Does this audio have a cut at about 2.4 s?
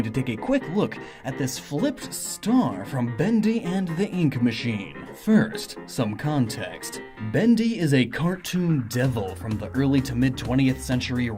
yes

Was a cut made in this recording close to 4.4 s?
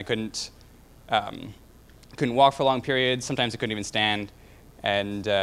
no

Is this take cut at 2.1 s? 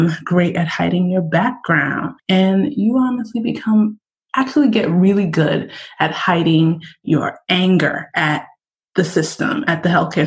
yes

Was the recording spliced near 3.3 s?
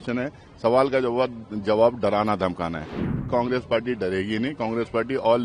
yes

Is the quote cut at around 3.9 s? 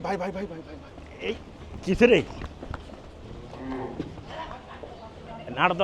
no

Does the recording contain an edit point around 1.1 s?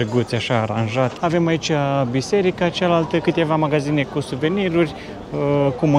yes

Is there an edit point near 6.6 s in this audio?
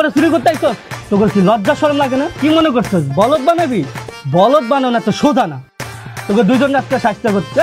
no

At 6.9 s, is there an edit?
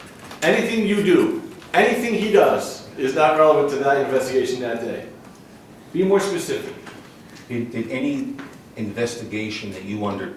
no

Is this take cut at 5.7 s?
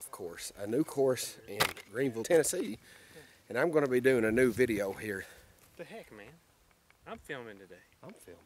no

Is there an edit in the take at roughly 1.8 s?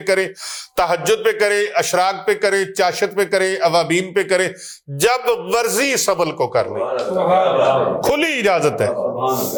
no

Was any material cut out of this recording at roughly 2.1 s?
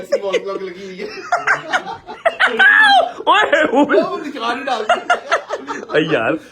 yes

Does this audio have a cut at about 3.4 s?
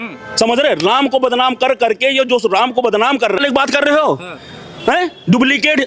yes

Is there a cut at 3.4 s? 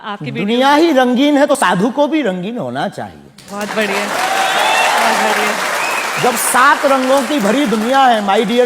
no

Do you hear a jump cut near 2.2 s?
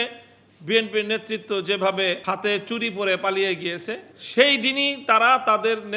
yes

